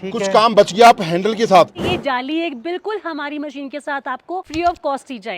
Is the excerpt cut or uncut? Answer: cut